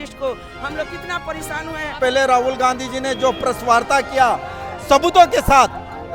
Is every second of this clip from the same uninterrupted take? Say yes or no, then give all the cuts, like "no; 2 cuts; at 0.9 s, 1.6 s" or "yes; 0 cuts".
no; 1 cut; at 2.0 s